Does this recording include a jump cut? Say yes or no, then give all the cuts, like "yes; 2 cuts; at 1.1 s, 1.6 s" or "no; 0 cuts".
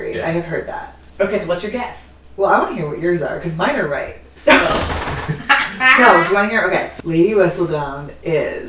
yes; 1 cut; at 7.0 s